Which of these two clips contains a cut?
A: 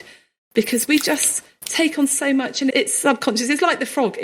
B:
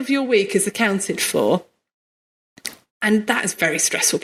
A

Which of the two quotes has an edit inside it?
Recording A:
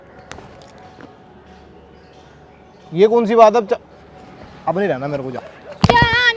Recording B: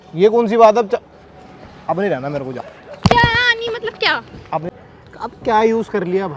B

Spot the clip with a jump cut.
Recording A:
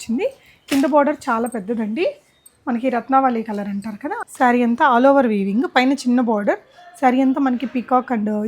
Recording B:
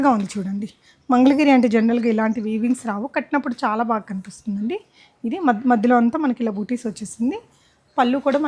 A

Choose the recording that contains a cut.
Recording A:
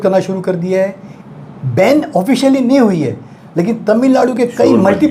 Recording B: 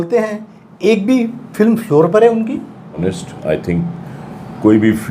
B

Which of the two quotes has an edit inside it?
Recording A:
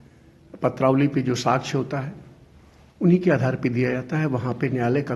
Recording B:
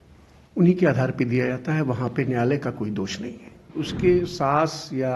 B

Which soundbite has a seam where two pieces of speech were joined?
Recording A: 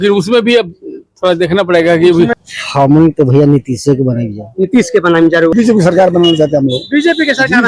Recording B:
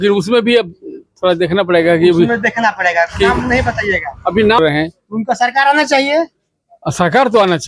A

